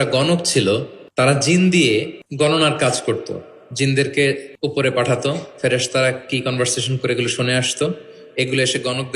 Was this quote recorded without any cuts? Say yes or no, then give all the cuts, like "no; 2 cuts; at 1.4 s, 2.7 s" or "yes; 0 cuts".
no; 3 cuts; at 1.0 s, 2.2 s, 4.5 s